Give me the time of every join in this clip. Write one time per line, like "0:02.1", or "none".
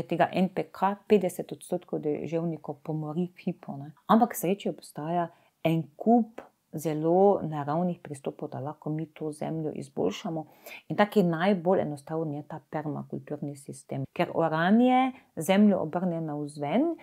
0:03.9
0:14.0